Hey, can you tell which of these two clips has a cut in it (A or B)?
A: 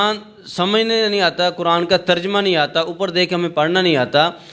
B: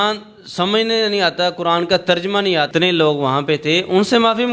B